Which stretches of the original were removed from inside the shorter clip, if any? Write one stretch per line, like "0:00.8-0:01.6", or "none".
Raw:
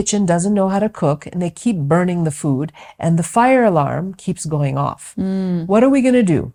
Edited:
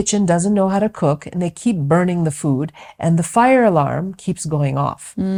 none

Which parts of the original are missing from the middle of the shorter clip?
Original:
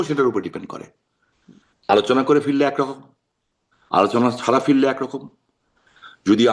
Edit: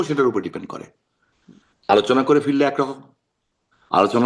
none

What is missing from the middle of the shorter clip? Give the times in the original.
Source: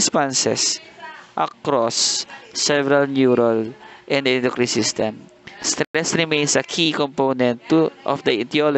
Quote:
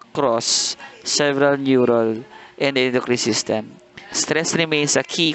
0:05.8-0:05.9

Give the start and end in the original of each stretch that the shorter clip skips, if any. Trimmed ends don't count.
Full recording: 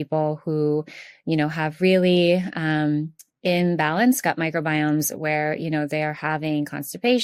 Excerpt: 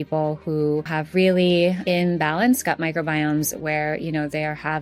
0:01.0-0:01.6
0:02.5-0:03.4

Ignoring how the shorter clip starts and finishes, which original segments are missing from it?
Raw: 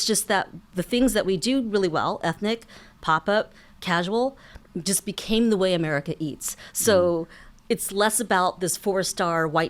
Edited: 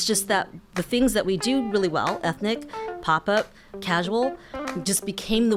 none

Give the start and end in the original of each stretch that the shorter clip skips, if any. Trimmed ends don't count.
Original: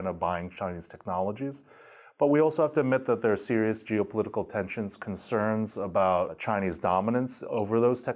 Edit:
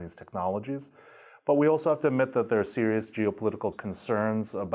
0:04.5-0:05.0

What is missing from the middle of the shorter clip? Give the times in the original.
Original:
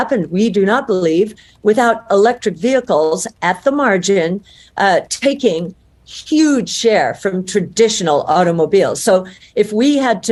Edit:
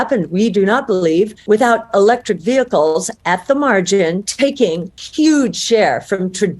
0:01.4-0:01.5
0:04.7-0:05.7

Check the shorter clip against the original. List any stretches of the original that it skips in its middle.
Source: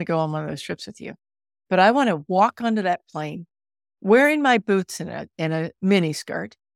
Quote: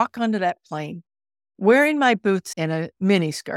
0:04.9-0:05.3

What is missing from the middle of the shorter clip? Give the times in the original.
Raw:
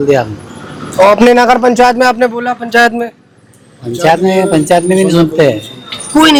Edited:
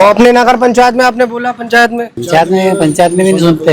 0:03.2-0:03.9

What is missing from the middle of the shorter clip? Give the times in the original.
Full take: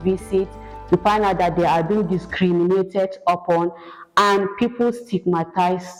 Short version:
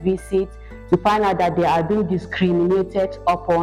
none

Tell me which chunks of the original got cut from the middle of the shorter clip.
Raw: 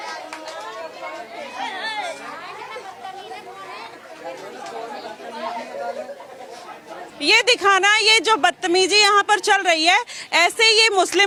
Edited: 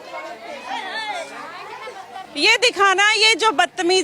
0:03.2-0:07.1

